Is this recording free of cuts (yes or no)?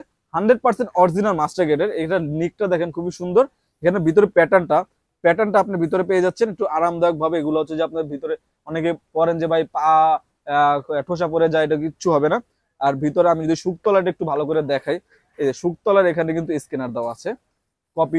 yes